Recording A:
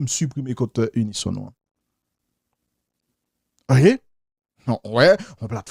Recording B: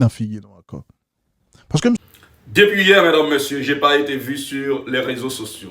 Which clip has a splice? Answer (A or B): B